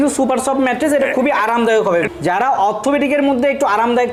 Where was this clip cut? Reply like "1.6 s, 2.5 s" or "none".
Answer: none